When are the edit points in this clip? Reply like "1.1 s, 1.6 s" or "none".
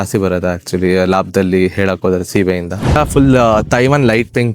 3.0 s